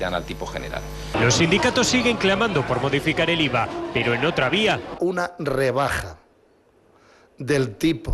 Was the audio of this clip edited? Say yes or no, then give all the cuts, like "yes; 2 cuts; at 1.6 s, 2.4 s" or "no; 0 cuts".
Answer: no; 0 cuts